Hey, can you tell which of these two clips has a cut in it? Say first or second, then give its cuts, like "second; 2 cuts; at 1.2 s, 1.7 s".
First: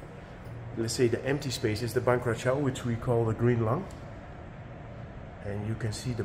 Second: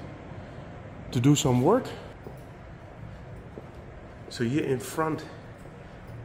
second; 1 cut; at 2.1 s